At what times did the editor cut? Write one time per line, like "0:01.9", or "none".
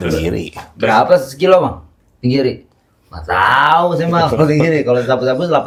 none

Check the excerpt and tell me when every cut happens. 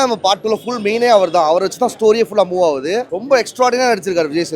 0:03.1

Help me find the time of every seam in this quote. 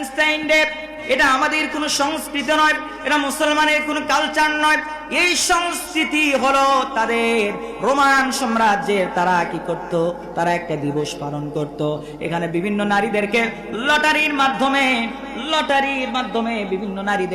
0:01.0

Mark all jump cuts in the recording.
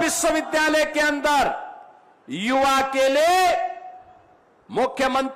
none

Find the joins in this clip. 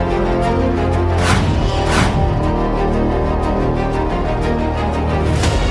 0:03.2

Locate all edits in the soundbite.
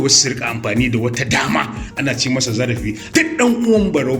0:03.0

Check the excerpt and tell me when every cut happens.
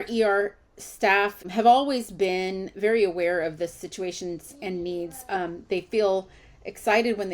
0:01.5

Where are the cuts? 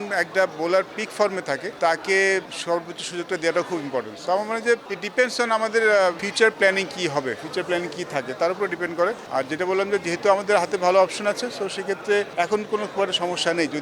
none

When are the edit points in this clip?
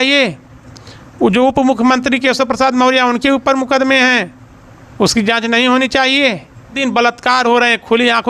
0:06.7

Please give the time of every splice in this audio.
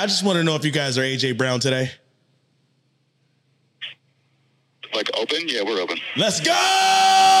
none

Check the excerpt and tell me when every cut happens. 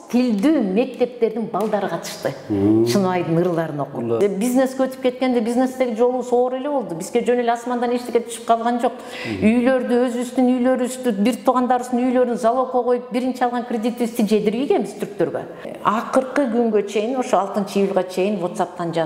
0:04.2
0:15.6

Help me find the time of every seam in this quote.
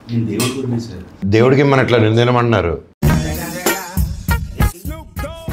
0:01.0

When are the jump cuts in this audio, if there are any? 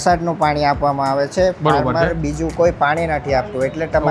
none

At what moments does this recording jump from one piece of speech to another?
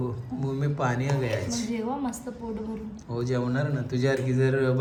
none

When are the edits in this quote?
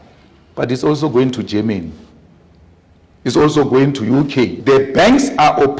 0:04.6

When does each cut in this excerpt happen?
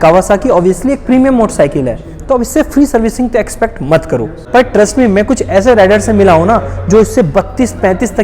0:04.4

